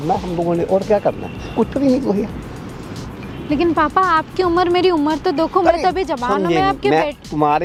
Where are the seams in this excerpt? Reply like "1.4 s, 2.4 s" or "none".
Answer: none